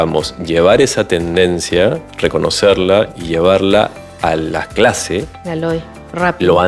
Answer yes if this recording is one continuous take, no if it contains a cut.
yes